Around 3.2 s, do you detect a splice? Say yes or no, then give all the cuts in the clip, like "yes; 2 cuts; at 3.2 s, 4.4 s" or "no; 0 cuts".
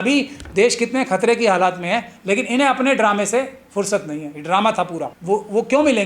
no; 1 cut; at 5.1 s